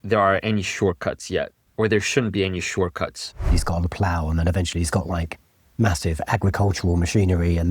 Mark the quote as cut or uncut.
cut